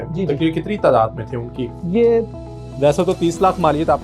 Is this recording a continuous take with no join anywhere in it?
yes; 0 cuts

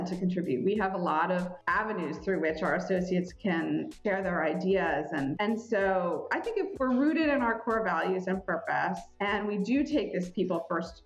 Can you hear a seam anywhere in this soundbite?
yes; 1 cut; at 6.8 s

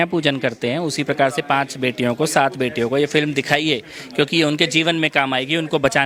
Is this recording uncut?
yes; 0 cuts

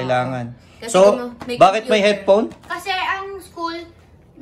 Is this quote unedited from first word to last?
yes; 0 cuts

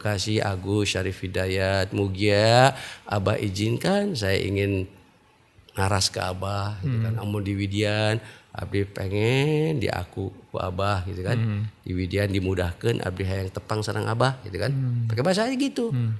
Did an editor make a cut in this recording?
no; 0 cuts

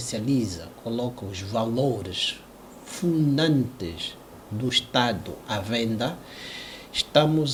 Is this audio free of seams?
yes; 0 cuts

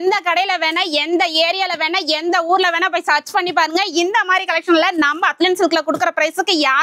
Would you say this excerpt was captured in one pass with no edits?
yes; 0 cuts

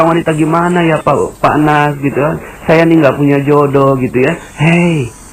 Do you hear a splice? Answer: no; 0 cuts

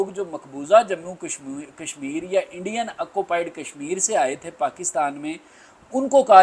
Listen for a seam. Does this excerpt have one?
no; 0 cuts

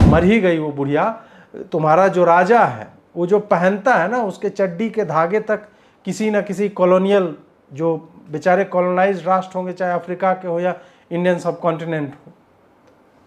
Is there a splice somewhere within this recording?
no; 0 cuts

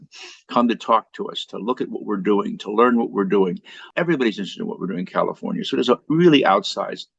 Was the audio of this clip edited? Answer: yes; 1 cut; at 3.9 s

